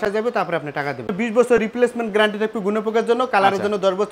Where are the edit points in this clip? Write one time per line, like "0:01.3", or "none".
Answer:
0:01.1